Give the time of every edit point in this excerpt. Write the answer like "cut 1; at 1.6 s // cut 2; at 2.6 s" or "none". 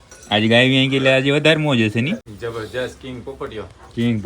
cut 1; at 2.2 s